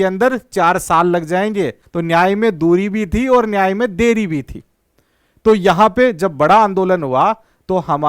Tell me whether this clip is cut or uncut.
cut